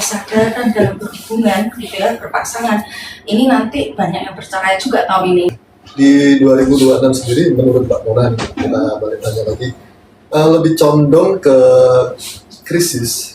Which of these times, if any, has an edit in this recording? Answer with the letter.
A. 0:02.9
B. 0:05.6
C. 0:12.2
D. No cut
B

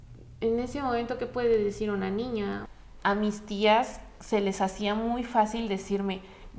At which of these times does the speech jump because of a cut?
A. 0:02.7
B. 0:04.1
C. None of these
A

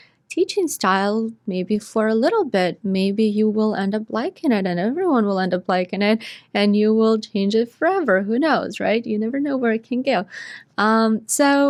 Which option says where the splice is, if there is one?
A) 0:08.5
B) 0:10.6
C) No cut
C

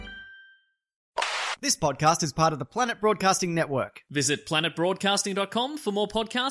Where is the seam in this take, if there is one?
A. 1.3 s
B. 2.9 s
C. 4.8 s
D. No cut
A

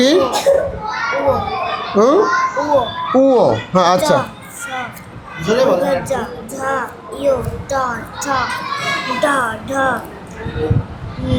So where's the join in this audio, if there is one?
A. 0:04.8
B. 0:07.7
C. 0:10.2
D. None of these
D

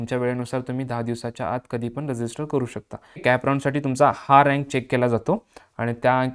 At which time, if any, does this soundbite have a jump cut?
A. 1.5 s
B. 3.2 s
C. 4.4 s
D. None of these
B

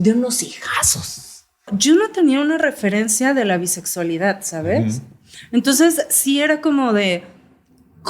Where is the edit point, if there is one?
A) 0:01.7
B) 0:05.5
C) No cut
A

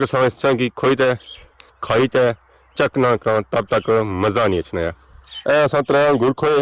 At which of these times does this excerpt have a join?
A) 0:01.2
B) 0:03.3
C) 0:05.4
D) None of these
C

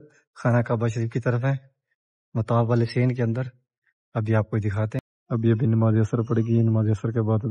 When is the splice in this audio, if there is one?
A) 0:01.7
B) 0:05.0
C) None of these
B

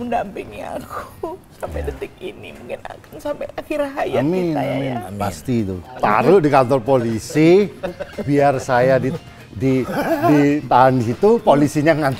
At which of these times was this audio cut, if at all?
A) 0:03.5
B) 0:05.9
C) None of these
B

